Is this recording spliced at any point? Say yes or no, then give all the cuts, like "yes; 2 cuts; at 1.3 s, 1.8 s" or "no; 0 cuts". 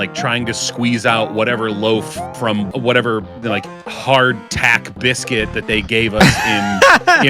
yes; 1 cut; at 2.7 s